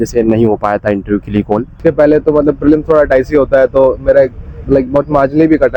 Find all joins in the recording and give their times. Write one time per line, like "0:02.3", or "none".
0:01.8